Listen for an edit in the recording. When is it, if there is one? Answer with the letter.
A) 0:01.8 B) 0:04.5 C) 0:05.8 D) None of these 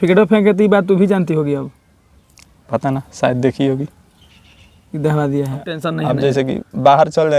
C